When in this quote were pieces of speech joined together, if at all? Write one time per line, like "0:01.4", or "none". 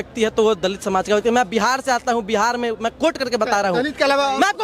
none